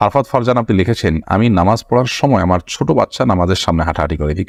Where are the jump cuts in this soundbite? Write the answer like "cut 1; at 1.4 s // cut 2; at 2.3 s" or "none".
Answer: none

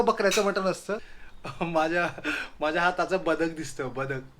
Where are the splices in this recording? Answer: cut 1; at 1.1 s

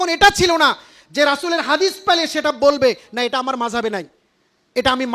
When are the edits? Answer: none

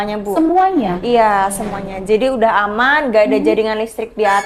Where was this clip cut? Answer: none

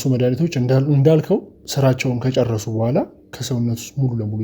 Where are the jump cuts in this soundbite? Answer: cut 1; at 1.6 s // cut 2; at 3.3 s

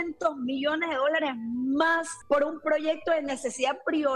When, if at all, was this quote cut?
cut 1; at 2.1 s

